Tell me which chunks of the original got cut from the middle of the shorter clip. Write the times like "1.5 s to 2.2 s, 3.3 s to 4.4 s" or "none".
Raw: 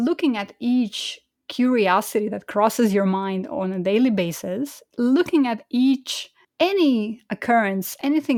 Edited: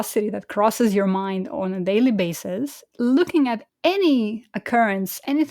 5.6 s to 6.4 s